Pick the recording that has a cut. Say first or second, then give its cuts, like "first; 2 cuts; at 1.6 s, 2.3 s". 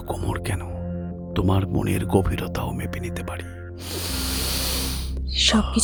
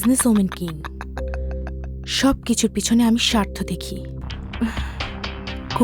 second; 1 cut; at 4.3 s